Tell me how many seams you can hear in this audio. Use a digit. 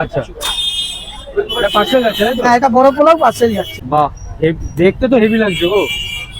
1